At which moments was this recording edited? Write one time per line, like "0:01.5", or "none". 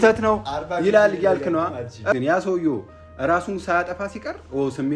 0:02.2